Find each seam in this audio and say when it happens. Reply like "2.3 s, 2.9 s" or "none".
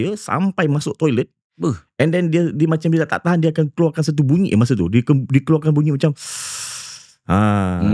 none